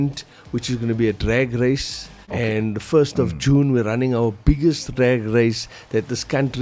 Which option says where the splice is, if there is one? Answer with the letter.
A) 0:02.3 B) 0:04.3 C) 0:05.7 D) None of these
A